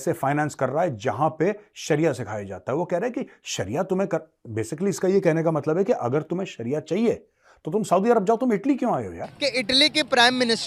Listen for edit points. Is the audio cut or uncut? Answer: cut